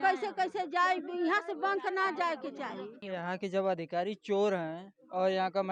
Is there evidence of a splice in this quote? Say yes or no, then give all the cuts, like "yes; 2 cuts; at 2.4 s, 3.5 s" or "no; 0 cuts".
yes; 1 cut; at 3.0 s